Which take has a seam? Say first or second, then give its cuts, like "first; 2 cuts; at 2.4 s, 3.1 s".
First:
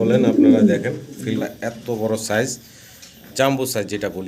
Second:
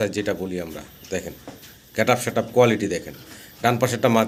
first; 1 cut; at 1.4 s